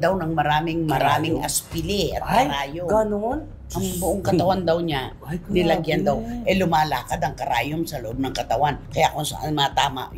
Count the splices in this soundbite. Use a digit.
0